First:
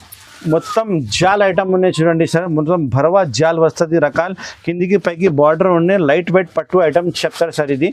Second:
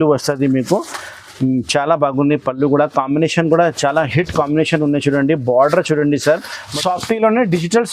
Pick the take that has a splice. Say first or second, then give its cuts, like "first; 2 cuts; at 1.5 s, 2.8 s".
second; 1 cut; at 6.6 s